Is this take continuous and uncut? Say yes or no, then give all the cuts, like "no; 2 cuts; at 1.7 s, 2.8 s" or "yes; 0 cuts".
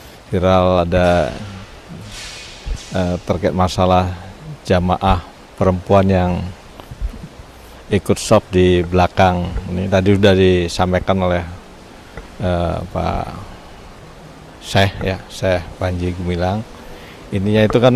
yes; 0 cuts